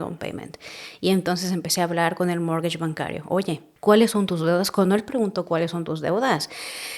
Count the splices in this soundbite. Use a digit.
1